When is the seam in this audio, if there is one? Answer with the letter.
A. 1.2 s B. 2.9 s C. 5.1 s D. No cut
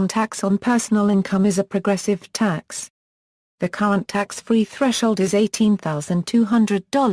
C